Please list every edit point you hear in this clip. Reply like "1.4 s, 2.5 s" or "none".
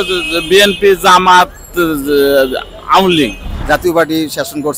3.5 s